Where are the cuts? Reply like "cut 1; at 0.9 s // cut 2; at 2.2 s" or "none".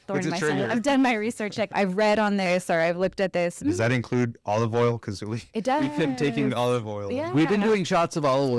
cut 1; at 1.6 s // cut 2; at 3.6 s